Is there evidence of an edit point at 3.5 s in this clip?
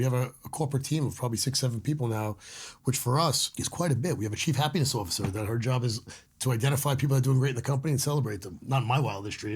yes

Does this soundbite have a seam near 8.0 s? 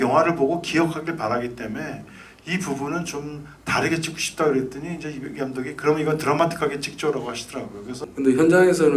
yes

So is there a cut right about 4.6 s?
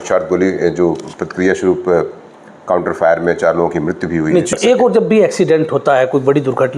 yes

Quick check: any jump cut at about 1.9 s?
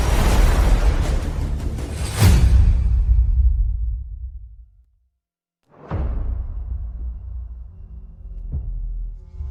no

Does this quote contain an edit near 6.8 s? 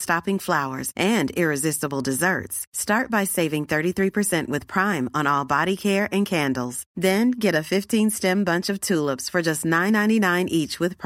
no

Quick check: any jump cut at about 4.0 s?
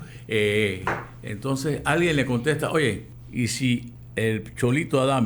yes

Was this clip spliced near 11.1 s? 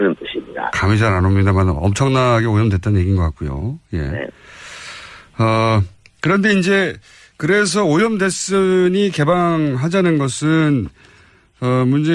no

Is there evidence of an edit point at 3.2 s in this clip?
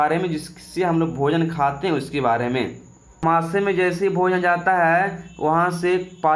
yes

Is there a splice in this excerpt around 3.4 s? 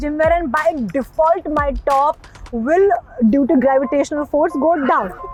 no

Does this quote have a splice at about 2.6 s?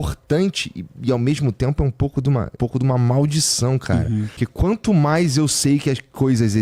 yes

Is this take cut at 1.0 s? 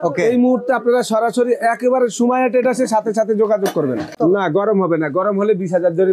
no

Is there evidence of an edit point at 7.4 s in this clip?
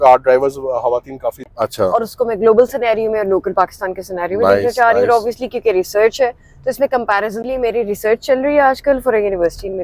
yes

